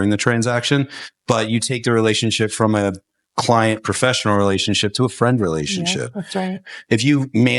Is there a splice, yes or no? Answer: yes